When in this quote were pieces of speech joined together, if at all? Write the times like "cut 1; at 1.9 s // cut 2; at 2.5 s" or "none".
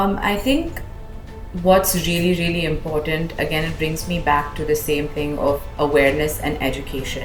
none